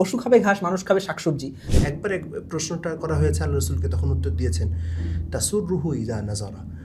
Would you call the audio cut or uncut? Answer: cut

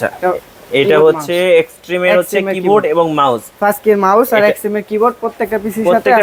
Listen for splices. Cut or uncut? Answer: uncut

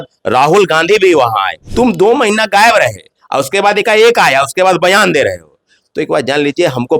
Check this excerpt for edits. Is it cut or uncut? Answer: cut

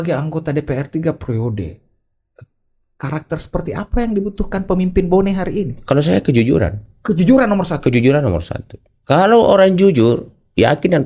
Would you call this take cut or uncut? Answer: uncut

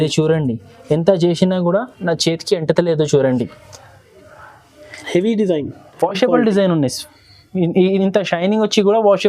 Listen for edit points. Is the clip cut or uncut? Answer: uncut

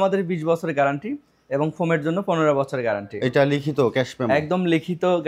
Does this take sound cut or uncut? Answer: uncut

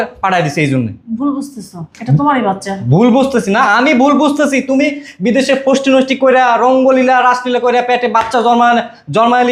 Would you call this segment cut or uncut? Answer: uncut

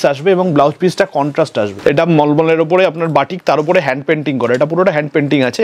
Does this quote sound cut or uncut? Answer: cut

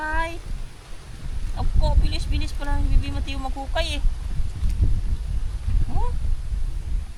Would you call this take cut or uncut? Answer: uncut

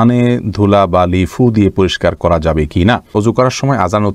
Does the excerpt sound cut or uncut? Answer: cut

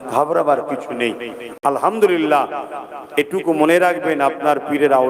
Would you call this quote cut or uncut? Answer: uncut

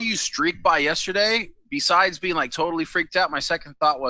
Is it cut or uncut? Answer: uncut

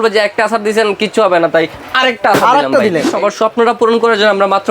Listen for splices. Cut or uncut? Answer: cut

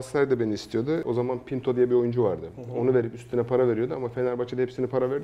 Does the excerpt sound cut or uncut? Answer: cut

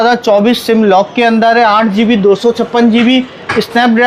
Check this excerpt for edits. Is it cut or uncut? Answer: uncut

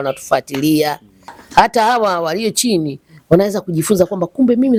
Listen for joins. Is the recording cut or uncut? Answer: uncut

